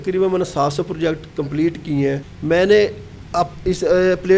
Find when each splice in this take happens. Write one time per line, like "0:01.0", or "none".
0:02.3